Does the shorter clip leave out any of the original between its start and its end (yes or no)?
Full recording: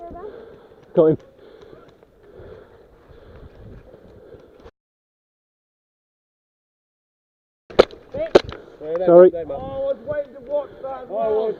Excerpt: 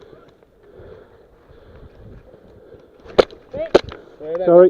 yes